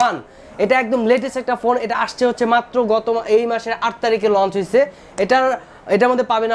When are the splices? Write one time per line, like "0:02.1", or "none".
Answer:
none